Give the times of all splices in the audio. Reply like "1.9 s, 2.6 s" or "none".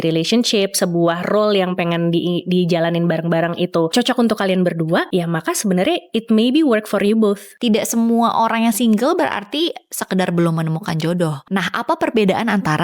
3.9 s, 5.1 s, 7.5 s, 11.4 s